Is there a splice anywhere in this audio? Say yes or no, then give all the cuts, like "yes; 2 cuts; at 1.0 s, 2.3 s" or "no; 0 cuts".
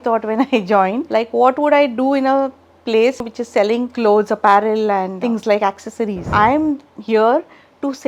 yes; 4 cuts; at 1.0 s, 3.7 s, 5.1 s, 6.2 s